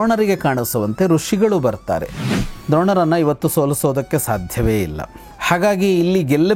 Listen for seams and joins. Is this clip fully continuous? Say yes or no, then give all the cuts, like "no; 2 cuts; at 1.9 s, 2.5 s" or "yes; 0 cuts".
no; 1 cut; at 2.5 s